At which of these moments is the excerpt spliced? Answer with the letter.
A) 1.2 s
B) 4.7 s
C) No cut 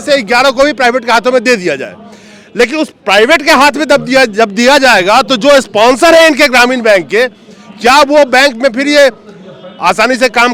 C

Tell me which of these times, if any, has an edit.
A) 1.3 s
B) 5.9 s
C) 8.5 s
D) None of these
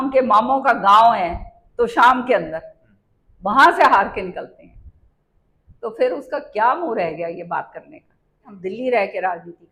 C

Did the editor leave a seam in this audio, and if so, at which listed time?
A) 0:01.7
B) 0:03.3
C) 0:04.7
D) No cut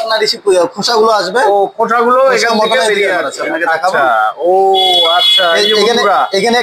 B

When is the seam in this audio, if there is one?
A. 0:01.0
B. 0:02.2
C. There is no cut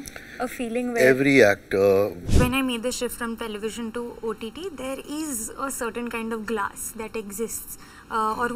B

